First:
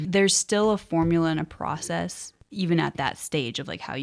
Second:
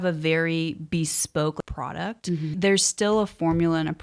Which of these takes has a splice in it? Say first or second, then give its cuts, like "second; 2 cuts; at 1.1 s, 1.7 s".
second; 1 cut; at 1.6 s